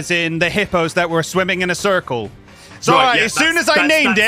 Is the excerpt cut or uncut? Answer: uncut